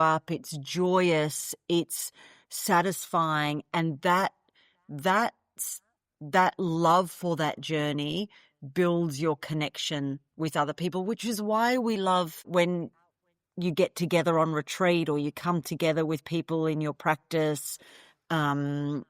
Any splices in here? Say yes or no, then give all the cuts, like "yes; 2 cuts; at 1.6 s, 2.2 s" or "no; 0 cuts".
yes; 1 cut; at 12.5 s